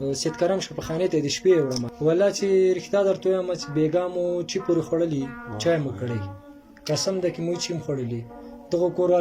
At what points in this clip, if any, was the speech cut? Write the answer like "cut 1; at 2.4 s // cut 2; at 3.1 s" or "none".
cut 1; at 1.9 s